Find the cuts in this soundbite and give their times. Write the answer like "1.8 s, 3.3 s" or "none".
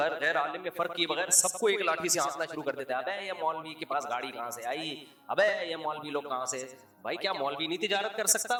none